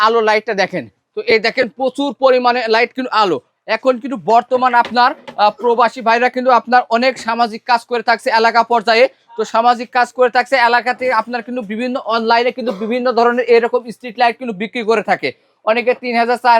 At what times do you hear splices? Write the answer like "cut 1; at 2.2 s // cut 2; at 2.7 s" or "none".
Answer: none